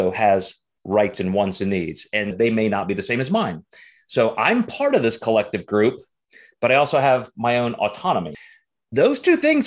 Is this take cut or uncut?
cut